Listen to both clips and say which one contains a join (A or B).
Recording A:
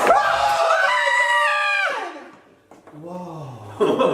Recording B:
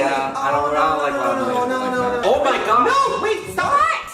B